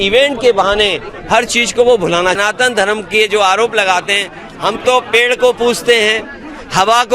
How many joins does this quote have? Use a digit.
1